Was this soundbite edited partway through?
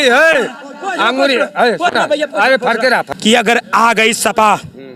yes; 1 cut; at 3.6 s

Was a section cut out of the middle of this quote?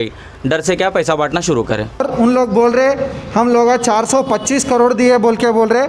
yes; 1 cut; at 2.1 s

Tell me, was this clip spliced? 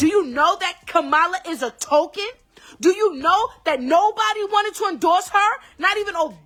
no; 0 cuts

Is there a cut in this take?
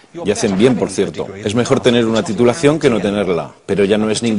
yes; 1 cut; at 2.3 s

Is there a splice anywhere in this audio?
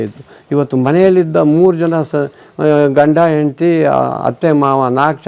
no; 0 cuts

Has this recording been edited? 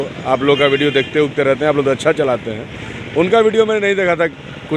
no; 0 cuts

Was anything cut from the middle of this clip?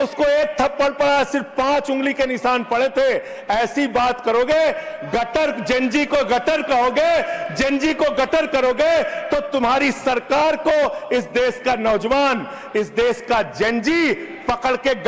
no; 0 cuts

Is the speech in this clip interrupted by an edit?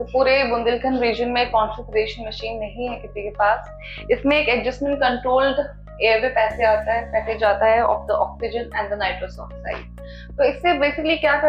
no; 0 cuts

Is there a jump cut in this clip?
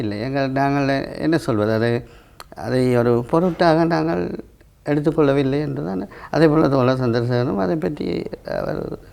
no; 0 cuts

